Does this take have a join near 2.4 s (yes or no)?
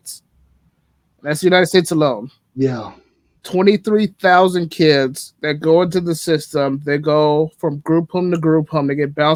no